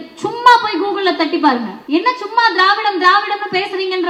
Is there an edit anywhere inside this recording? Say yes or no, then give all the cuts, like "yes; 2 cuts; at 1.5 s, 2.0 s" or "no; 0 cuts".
yes; 1 cut; at 1.7 s